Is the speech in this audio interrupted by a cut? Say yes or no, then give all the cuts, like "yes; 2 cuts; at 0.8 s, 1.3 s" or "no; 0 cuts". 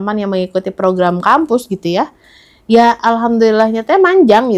no; 0 cuts